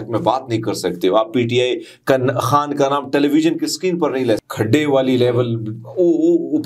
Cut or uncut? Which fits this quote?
cut